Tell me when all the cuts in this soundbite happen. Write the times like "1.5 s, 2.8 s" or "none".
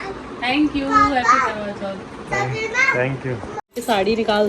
3.5 s